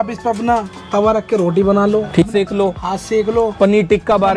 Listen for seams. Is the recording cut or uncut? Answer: cut